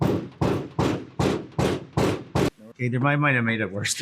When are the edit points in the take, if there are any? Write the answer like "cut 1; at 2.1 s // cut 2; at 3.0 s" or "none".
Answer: cut 1; at 2.7 s